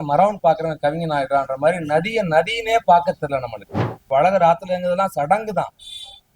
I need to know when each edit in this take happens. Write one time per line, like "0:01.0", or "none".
0:03.9